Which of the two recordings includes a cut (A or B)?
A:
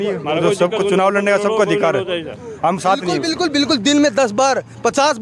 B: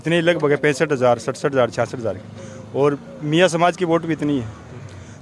A